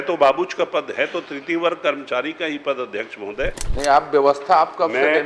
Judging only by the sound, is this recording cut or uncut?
cut